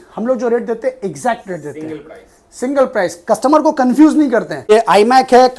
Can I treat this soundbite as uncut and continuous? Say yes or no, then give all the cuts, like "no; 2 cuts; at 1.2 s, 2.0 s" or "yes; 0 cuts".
no; 1 cut; at 4.6 s